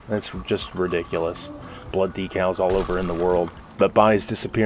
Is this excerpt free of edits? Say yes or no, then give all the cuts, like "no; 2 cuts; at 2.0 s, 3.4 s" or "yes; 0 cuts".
no; 2 cuts; at 1.9 s, 3.6 s